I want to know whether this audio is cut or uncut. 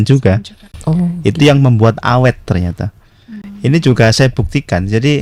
uncut